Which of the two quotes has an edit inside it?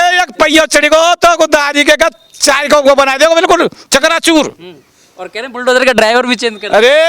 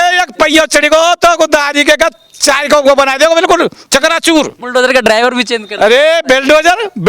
second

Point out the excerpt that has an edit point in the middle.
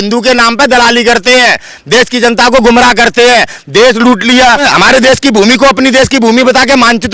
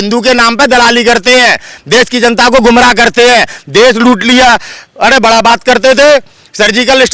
first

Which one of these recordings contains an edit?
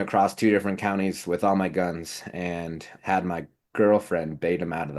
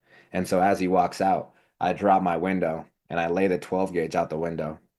first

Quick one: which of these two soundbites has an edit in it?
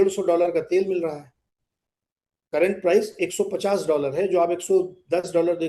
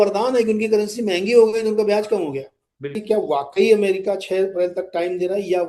second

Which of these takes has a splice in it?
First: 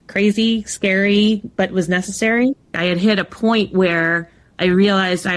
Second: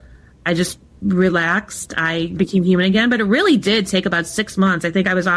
first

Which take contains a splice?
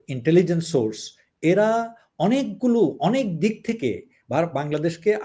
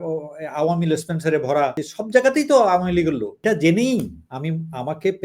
second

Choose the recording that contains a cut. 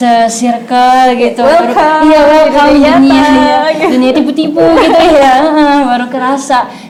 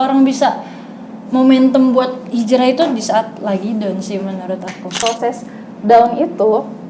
second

